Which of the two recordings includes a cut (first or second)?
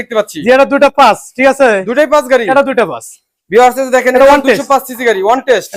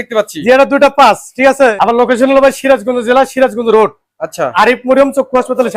second